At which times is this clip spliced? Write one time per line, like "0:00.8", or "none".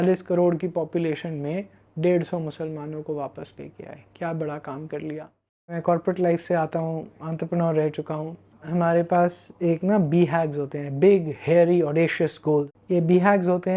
0:05.8
0:12.8